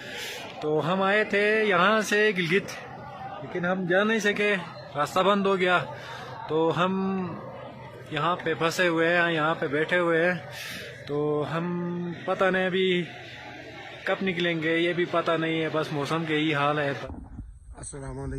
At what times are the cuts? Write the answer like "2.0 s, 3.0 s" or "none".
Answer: 17.0 s

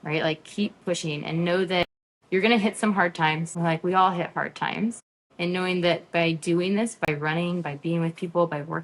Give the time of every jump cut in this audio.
3.5 s

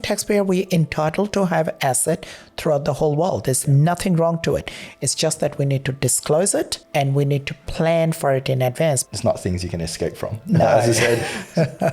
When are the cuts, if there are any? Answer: 6.8 s, 9.1 s

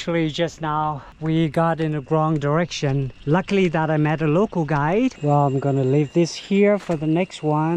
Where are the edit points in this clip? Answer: 1.1 s, 3.1 s, 5.2 s

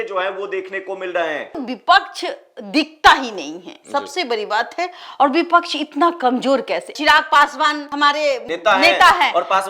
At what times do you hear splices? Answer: 1.6 s, 6.9 s

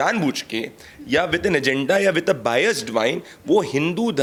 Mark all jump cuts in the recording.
none

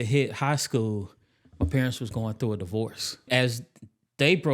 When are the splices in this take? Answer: 3.3 s

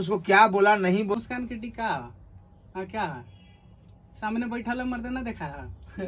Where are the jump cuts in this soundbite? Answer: 1.1 s

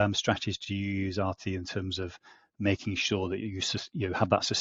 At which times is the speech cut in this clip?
none

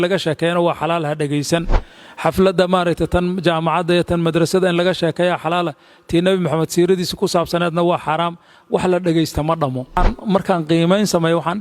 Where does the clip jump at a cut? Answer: 10.0 s

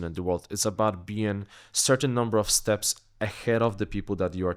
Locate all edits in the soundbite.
none

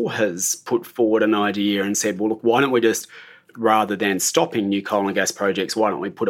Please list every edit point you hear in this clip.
none

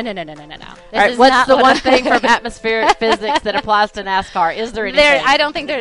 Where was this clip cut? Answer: none

